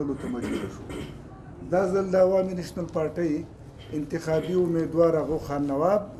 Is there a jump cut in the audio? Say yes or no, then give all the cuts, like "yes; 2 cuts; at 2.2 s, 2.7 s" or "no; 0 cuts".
no; 0 cuts